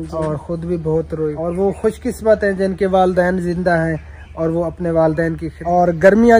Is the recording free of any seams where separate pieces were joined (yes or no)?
no